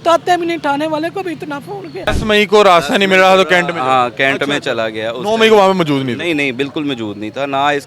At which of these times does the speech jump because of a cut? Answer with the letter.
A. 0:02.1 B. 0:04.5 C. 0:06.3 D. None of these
A